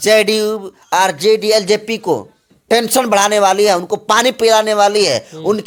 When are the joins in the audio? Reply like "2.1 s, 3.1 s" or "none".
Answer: none